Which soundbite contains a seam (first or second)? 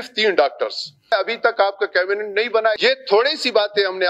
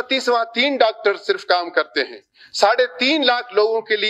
first